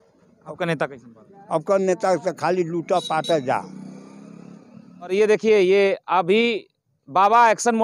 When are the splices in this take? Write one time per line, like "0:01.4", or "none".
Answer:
0:05.1